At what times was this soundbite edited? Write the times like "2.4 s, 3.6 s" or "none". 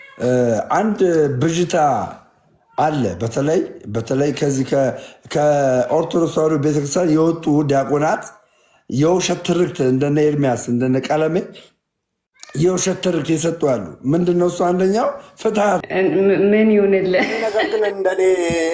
15.8 s